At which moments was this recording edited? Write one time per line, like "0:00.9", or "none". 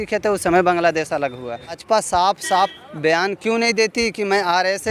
0:01.7